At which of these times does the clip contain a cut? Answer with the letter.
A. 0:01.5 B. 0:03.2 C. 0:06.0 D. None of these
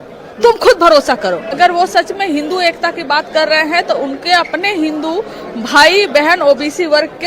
A